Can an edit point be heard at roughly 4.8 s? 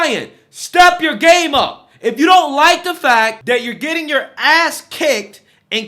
no; 1 cut; at 3.4 s

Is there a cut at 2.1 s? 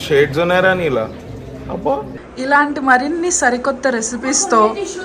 yes; 1 cut; at 2.1 s

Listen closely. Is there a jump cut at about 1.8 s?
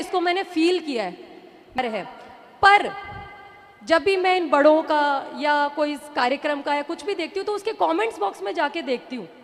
yes; 1 cut; at 1.8 s

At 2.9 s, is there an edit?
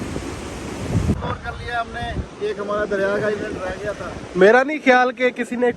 no; 1 cut; at 1.2 s

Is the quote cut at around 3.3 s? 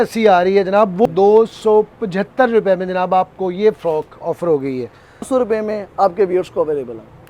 no; 2 cuts; at 1.1 s, 5.3 s

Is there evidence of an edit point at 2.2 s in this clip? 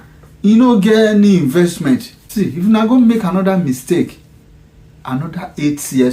yes; 1 cut; at 2.2 s

